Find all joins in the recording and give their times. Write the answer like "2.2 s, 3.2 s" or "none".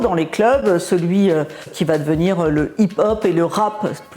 1.7 s